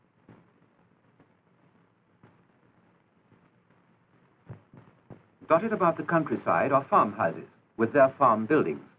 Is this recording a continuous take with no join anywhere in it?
no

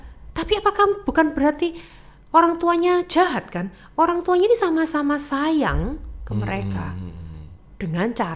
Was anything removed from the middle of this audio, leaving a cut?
no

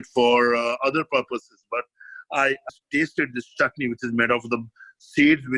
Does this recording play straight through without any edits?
no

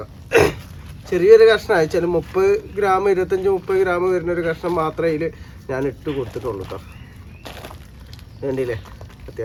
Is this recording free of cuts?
yes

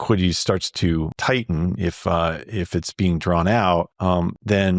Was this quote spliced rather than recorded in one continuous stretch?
yes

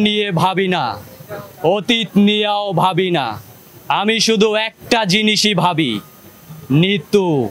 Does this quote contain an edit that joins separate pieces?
no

